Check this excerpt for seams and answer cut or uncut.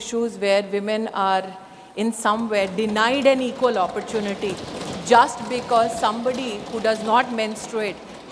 uncut